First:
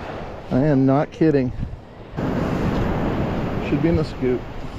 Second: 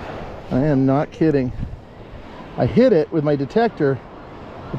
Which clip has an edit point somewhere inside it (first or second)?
first